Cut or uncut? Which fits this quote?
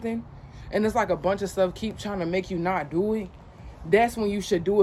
uncut